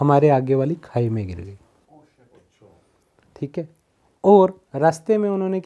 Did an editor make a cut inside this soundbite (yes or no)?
no